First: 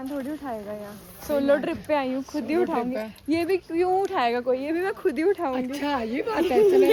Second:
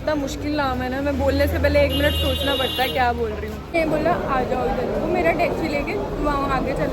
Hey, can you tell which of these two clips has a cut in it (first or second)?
second